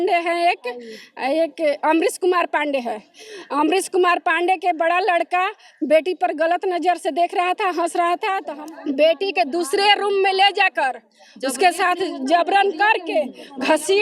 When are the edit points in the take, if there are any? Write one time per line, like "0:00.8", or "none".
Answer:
0:08.5